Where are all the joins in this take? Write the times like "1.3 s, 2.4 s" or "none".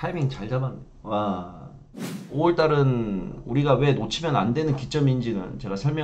1.8 s